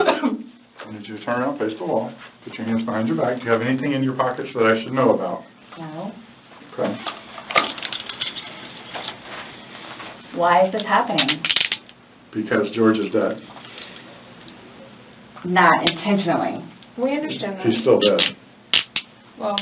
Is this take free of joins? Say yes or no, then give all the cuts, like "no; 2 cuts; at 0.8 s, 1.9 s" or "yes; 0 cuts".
yes; 0 cuts